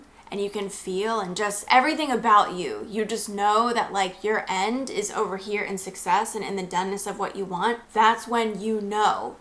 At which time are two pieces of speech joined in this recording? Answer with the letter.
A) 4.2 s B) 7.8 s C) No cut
B